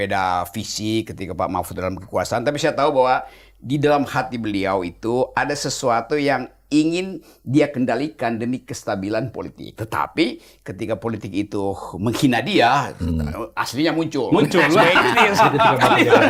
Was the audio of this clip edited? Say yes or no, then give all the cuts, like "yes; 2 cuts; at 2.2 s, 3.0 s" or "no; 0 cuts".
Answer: no; 0 cuts